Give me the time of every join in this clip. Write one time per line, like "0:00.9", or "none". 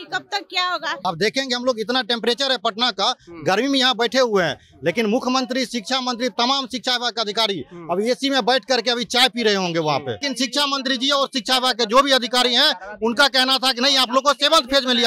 0:01.0
0:10.3